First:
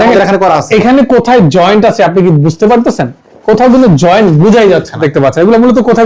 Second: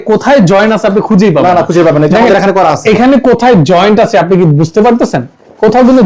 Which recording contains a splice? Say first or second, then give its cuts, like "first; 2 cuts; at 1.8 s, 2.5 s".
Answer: first; 1 cut; at 5.0 s